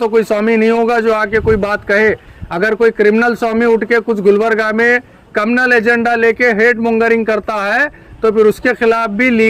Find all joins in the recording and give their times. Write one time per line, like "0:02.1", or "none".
none